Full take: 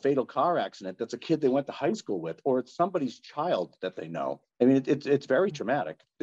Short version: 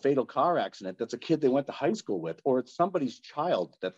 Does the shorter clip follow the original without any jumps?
yes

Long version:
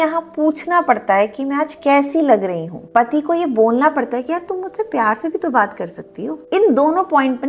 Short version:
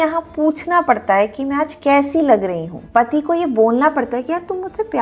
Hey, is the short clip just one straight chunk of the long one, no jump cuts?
yes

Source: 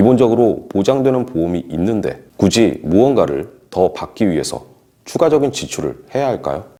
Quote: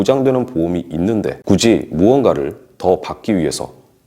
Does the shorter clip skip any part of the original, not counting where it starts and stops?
yes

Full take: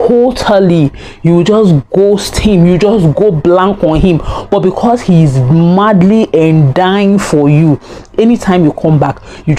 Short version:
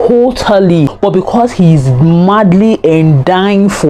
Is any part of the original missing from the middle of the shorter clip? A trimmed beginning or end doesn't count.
yes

